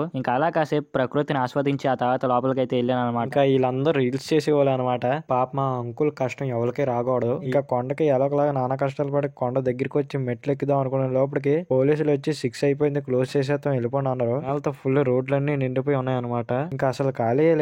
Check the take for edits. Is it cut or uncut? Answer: cut